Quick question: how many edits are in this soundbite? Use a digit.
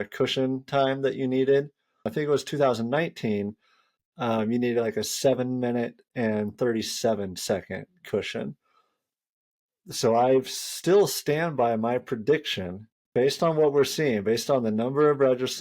2